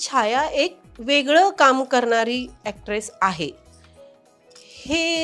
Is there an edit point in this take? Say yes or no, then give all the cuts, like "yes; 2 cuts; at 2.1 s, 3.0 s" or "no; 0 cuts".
no; 0 cuts